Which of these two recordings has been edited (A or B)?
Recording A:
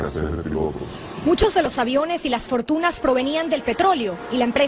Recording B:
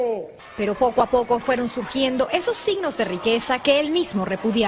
A